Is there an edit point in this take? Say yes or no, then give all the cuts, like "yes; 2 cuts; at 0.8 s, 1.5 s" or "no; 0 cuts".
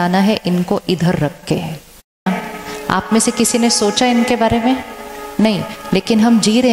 yes; 1 cut; at 2.3 s